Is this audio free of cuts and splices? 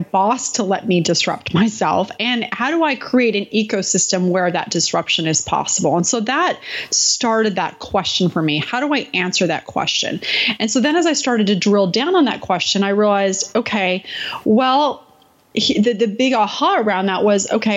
yes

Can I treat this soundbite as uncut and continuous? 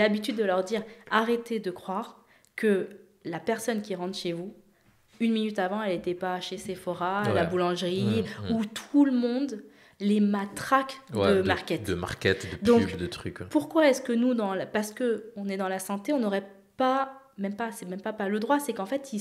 yes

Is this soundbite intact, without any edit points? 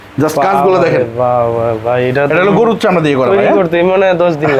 yes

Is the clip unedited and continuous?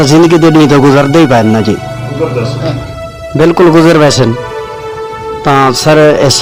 yes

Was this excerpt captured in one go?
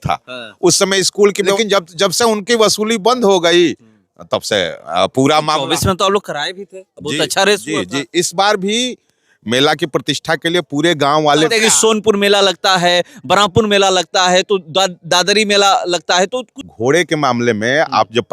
no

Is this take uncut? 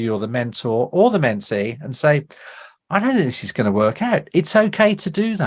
yes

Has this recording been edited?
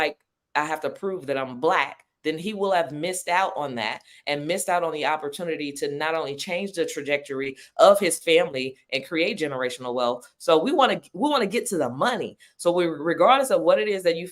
no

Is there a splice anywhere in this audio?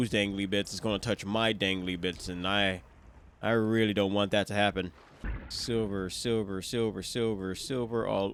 no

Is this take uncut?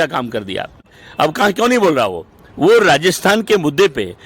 no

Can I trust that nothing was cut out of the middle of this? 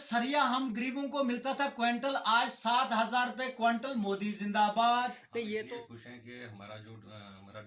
no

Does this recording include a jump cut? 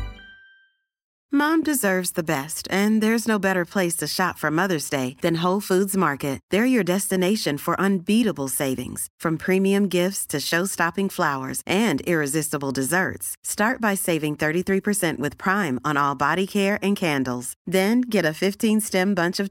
yes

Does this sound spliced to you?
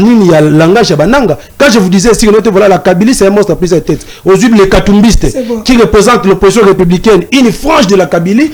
no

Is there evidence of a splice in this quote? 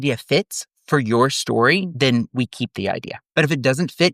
yes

